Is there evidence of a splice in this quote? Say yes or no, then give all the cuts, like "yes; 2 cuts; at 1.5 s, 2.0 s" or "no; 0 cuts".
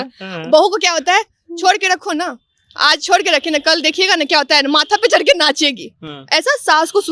no; 0 cuts